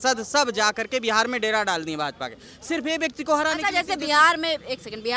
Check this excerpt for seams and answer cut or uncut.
uncut